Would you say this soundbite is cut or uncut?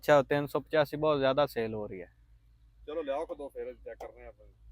uncut